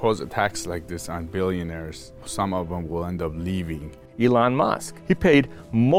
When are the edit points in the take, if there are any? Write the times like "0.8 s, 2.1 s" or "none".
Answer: 2.3 s, 4.0 s, 4.9 s